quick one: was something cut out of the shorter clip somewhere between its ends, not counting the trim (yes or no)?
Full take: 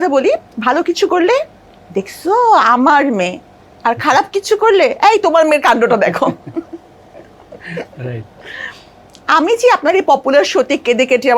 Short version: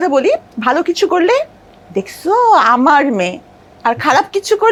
no